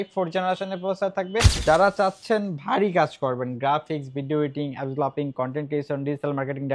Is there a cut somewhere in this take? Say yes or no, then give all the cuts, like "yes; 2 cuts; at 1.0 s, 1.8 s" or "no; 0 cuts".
yes; 1 cut; at 1.5 s